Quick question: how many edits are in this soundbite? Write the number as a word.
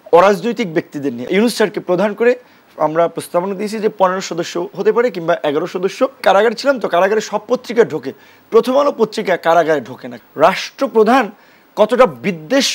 three